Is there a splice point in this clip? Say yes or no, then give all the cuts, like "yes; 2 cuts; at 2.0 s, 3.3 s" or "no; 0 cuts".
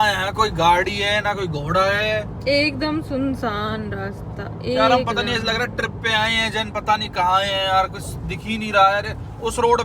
no; 0 cuts